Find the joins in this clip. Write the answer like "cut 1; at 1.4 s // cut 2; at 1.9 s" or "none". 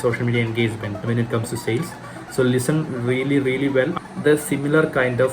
cut 1; at 1.0 s // cut 2; at 4.0 s